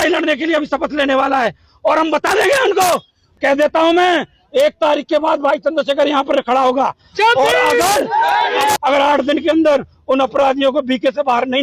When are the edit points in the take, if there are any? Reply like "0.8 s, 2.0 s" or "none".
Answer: 3.2 s, 8.8 s